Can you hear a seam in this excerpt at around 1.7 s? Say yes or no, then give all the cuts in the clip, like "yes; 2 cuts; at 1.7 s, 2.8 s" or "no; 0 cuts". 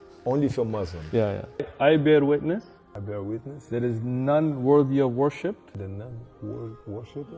yes; 1 cut; at 1.7 s